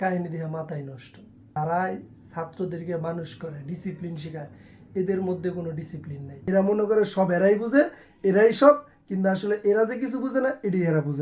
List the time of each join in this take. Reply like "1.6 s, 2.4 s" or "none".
1.4 s, 6.4 s